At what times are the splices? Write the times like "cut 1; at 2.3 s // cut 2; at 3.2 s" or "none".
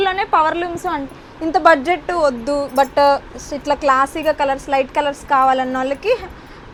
none